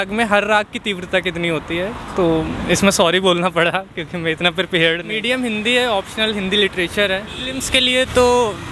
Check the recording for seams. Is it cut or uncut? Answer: cut